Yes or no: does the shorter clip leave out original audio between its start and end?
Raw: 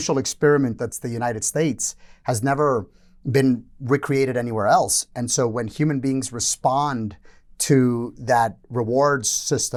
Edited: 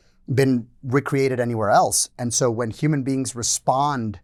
no